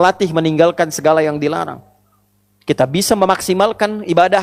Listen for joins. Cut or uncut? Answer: uncut